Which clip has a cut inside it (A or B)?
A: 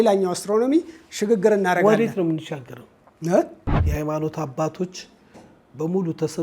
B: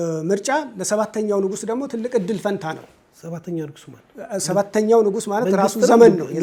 A